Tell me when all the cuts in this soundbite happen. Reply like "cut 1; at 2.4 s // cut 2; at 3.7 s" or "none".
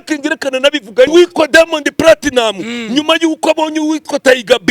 cut 1; at 1.1 s